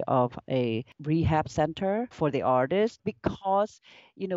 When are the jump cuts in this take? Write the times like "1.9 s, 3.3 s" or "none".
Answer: 0.9 s, 2.1 s, 3.0 s